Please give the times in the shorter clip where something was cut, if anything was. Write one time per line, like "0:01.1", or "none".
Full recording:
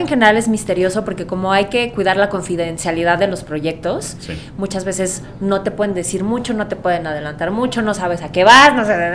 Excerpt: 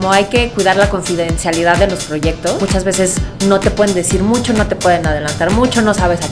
0:02.6